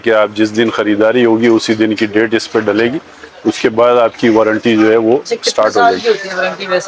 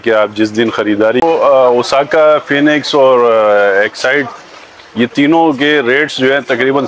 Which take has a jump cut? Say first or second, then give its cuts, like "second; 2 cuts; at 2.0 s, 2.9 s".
second; 1 cut; at 1.2 s